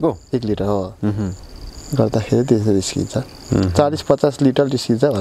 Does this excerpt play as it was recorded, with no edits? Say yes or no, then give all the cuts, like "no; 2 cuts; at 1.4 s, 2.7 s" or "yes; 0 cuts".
yes; 0 cuts